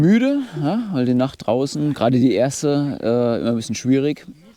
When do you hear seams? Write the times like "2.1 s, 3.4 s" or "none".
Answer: none